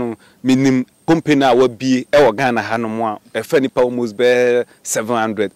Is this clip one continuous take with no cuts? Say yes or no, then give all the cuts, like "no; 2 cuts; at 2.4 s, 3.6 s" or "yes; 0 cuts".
no; 1 cut; at 0.9 s